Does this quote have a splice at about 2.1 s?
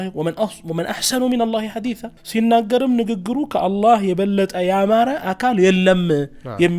yes; 1 cut; at 2.1 s

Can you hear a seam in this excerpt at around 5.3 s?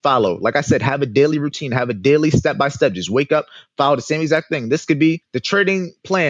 yes; 1 cut; at 5.3 s

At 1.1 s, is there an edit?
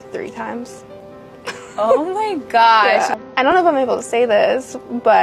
no; 1 cut; at 3.1 s

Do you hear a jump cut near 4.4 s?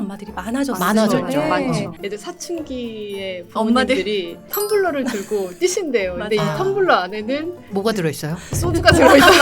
yes; 2 cuts; at 1.9 s, 4.4 s

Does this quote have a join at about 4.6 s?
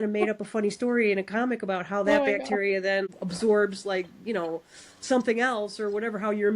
no; 1 cut; at 3.1 s

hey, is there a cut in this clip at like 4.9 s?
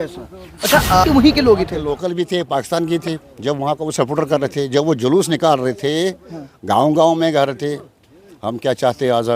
no; 1 cut; at 1.0 s

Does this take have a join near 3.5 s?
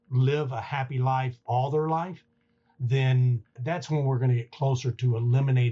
no; 1 cut; at 1.4 s

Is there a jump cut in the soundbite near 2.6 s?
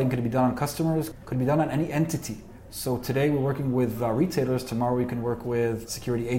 yes; 2 cuts; at 1.1 s, 2.6 s

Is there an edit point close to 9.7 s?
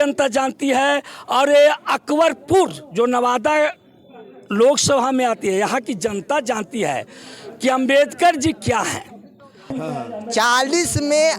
yes; 1 cut; at 9.7 s

